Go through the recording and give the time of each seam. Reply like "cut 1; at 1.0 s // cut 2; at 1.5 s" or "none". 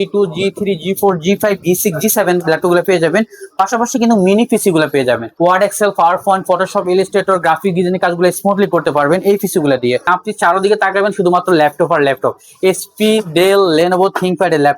cut 1; at 5.3 s // cut 2; at 10.0 s